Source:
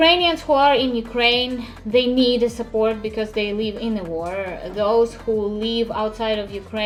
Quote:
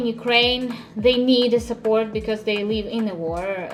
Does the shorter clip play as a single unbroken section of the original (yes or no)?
yes